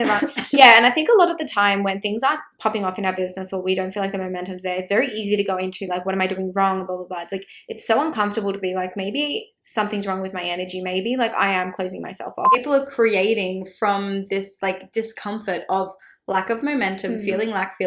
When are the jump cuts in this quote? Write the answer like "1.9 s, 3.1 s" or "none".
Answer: 12.6 s